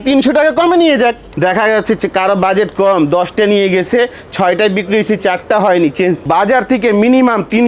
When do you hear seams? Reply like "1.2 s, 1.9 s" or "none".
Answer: 1.2 s, 6.2 s